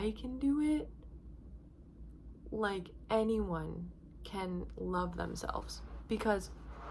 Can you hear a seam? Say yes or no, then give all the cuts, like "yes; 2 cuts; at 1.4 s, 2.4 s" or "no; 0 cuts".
no; 0 cuts